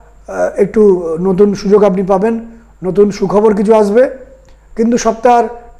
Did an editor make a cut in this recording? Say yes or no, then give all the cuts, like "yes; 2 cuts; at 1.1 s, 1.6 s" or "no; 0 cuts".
no; 0 cuts